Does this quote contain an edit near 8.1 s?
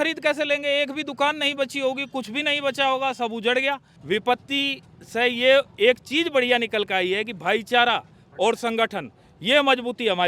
no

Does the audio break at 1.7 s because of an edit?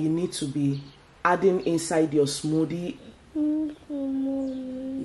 no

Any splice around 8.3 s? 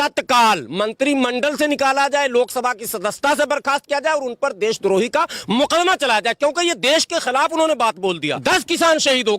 yes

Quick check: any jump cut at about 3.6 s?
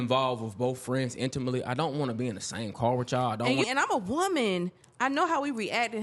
yes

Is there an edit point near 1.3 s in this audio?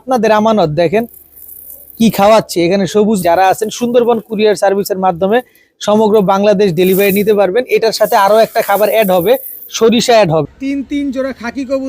no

